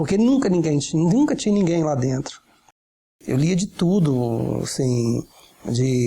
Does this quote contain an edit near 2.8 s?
yes; 1 cut; at 2.8 s

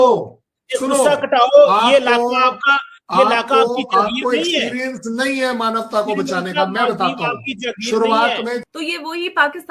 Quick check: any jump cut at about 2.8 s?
no; 1 cut; at 8.6 s

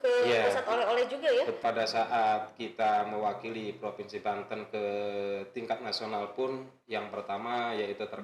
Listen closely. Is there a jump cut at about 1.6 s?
yes; 1 cut; at 1.6 s

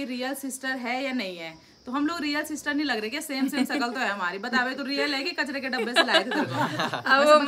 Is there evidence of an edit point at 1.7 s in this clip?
no; 0 cuts

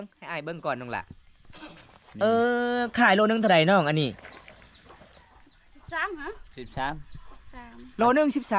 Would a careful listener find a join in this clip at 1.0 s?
no; 0 cuts

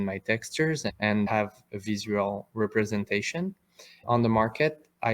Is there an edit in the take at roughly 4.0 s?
yes; 2 cuts; at 1.3 s, 4.0 s

